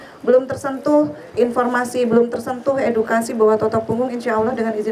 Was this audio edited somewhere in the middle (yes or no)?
no